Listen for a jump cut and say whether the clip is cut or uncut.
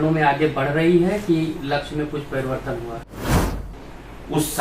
cut